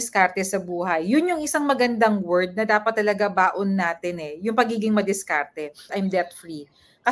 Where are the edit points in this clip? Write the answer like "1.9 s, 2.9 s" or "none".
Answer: 5.9 s